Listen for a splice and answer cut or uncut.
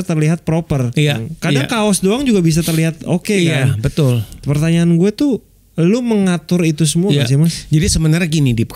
cut